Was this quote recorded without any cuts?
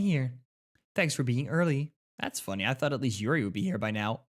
no; 1 cut; at 2.0 s

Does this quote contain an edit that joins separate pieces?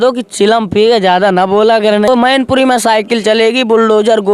yes; 1 cut; at 2.1 s

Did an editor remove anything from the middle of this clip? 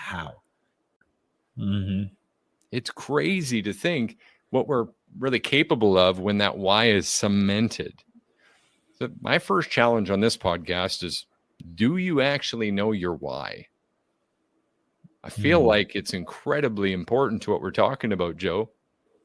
yes; 1 cut; at 1.0 s

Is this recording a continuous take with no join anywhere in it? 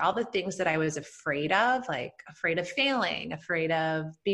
yes; 0 cuts

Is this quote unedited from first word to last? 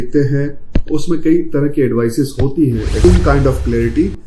no; 1 cut; at 3.0 s

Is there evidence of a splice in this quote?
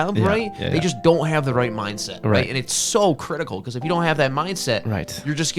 no; 0 cuts

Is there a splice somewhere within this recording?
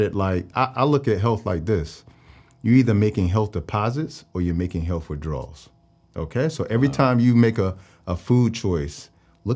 no; 0 cuts

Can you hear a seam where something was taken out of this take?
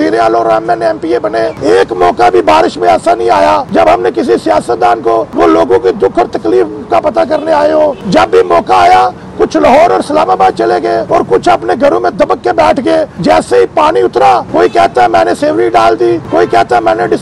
yes; 8 cuts; at 1.6 s, 3.7 s, 5.3 s, 8.0 s, 11.0 s, 13.1 s, 14.5 s, 16.2 s

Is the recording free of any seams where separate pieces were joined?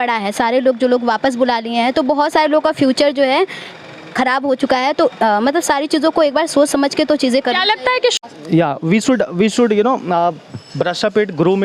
no; 1 cut; at 8.1 s

